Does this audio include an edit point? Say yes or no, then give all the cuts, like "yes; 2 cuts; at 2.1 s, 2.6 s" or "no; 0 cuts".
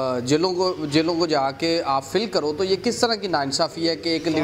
no; 0 cuts